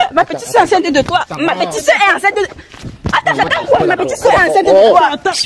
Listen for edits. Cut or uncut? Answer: uncut